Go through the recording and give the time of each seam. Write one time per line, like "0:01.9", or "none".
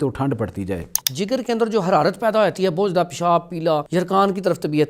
0:01.0
0:03.9